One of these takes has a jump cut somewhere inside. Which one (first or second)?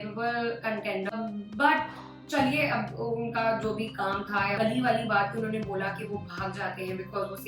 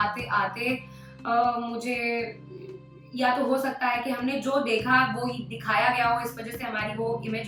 first